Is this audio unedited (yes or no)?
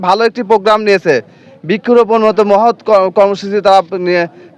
yes